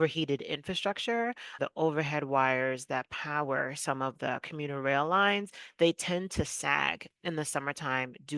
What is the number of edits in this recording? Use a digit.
1